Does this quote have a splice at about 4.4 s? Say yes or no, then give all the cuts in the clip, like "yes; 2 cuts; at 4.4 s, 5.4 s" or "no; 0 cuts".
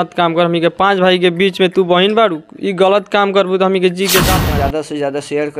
yes; 1 cut; at 4.4 s